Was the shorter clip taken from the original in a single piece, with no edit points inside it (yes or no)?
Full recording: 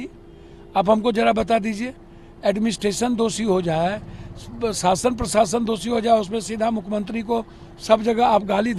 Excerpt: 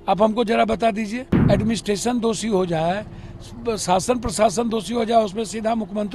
no